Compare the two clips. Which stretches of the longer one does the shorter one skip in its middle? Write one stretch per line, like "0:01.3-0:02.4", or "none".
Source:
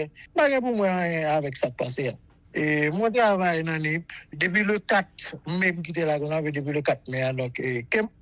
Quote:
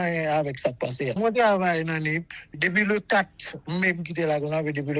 0:02.1-0:03.0

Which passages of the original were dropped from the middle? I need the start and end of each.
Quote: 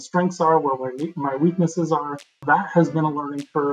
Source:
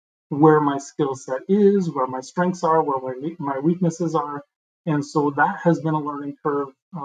0:04.7-0:05.3

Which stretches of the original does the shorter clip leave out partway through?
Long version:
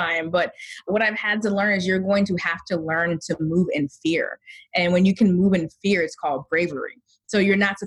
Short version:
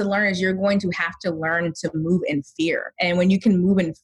0:04.3-0:04.6

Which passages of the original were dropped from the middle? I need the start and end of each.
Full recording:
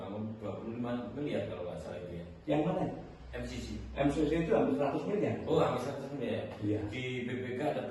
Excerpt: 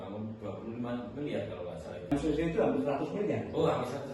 0:02.1-0:04.0

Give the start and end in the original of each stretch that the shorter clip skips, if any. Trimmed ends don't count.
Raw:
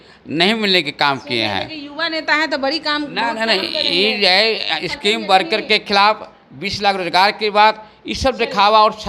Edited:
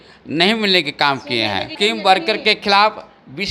0:01.7-0:04.9

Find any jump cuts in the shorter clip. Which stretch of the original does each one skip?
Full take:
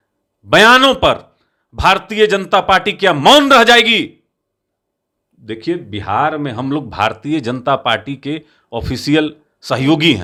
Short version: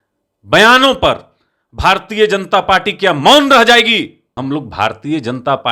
0:04.3-0:06.5

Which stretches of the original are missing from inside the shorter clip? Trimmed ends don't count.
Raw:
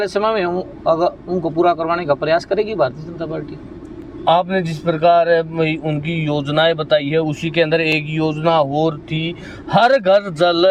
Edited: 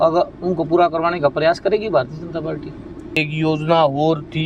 0:04.1-0:08.0

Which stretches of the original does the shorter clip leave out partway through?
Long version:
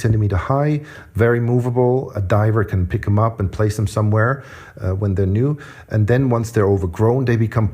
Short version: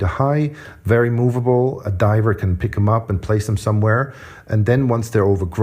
0:04.6-0:05.7

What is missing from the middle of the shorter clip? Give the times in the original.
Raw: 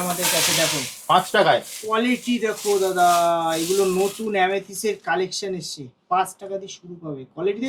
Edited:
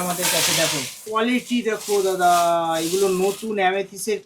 0:00.9-0:01.7

